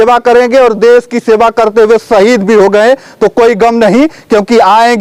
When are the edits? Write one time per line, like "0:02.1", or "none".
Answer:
none